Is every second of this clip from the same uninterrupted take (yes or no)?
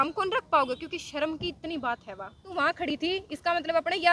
no